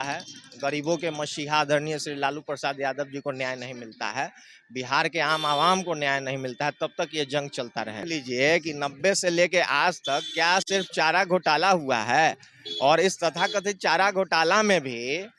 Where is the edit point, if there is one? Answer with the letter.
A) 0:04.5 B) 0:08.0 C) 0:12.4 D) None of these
B